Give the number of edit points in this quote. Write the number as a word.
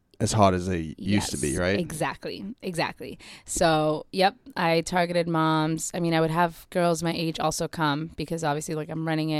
zero